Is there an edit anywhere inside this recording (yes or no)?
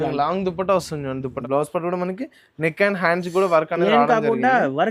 yes